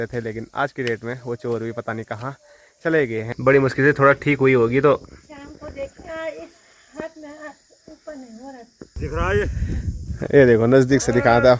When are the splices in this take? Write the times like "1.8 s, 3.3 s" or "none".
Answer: 3.3 s, 9.0 s